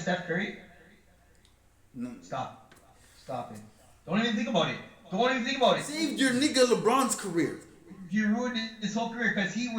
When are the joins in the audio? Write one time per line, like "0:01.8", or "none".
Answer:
0:06.0

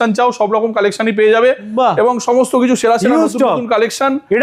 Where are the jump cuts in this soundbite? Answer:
none

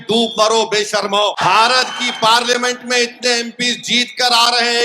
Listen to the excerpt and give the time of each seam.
0:01.4

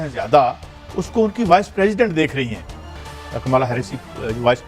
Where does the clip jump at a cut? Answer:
0:03.1

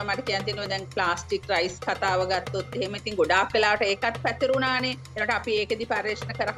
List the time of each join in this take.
none

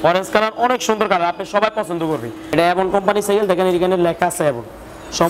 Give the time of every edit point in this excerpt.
0:02.4

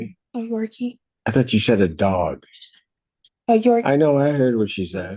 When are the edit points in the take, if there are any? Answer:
0:01.1

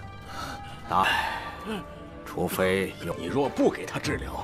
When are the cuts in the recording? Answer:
0:03.0

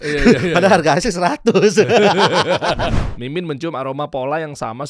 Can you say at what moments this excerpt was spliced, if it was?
0:02.9

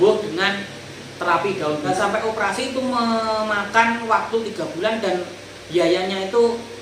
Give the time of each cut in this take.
0:01.9

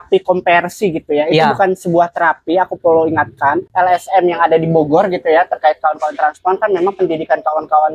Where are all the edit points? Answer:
0:03.7

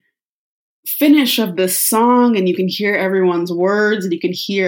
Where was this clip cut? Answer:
none

